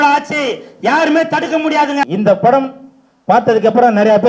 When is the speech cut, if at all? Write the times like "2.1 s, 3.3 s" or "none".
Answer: 2.1 s